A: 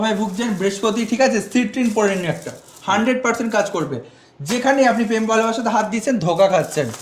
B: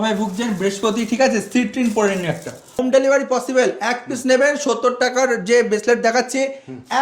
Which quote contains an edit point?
B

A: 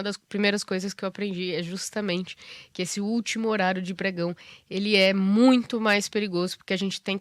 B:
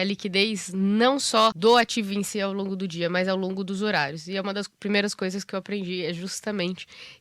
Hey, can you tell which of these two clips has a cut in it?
B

